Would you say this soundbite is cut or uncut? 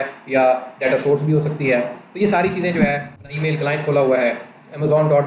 cut